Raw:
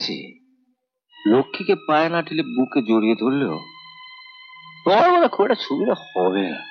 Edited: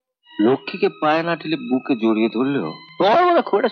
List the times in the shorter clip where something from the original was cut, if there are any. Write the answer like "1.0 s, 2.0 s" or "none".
2.8 s